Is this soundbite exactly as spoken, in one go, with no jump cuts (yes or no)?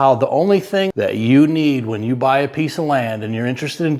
no